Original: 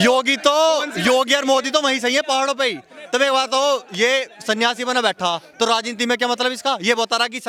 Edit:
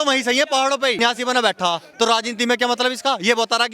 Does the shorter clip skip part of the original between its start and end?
yes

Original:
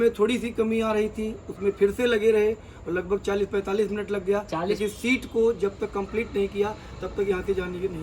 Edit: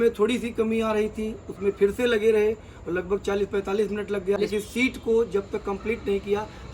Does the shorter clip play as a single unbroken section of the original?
no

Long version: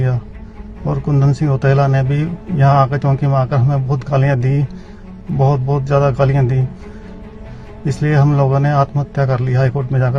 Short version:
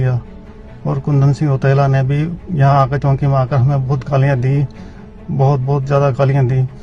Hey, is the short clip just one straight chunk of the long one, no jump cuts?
yes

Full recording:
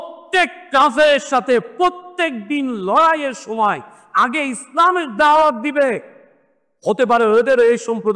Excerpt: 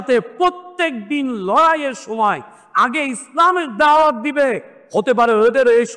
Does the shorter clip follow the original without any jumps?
no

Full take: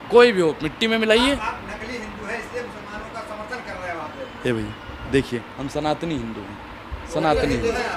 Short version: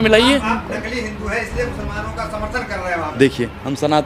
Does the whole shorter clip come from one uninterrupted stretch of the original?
no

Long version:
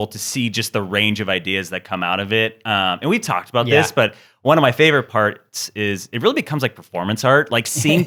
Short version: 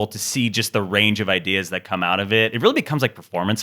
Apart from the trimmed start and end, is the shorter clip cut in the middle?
yes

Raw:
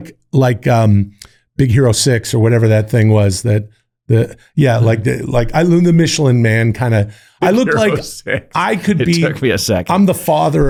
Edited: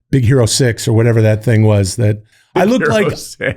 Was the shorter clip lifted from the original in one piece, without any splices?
no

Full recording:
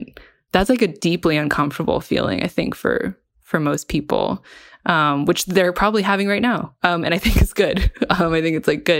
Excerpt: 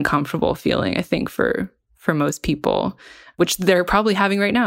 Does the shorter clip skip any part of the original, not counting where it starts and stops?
yes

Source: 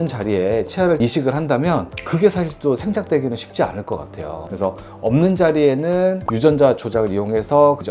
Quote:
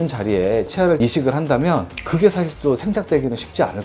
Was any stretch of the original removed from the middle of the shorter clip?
no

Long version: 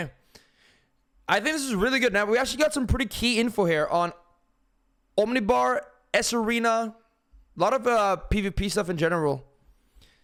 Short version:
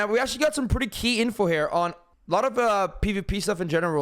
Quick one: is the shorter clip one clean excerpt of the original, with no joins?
no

